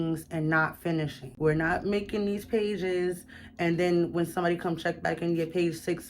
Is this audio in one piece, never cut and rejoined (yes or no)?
no